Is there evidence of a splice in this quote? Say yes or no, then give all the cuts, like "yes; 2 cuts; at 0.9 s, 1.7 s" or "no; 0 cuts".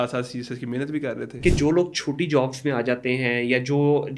yes; 1 cut; at 1.3 s